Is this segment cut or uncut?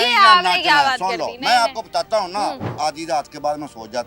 cut